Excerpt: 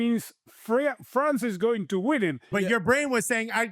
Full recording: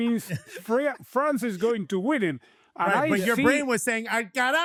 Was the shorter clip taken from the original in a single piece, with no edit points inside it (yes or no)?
no